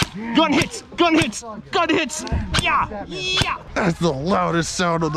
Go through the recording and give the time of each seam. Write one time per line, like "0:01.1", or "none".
0:03.7